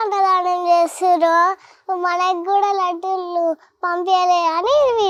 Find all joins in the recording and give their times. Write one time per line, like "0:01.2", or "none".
none